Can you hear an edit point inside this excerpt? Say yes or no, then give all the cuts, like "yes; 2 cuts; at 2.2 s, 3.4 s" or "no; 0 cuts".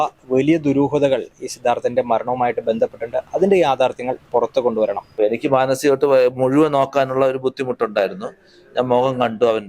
yes; 1 cut; at 5.0 s